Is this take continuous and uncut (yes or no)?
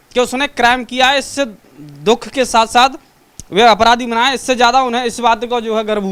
yes